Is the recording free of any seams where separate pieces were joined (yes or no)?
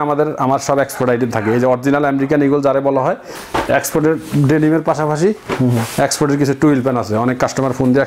no